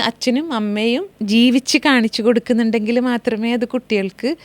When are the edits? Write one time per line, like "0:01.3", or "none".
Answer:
0:01.1